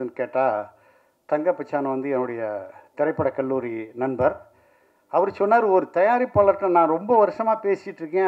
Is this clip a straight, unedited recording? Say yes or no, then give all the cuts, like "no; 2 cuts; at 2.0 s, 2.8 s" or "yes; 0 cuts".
yes; 0 cuts